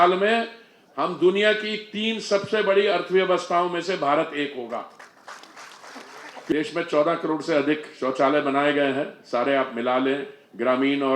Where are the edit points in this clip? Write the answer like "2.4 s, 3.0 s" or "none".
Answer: 6.5 s